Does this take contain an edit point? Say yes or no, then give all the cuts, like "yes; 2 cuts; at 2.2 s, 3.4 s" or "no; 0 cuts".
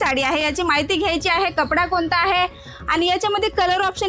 no; 0 cuts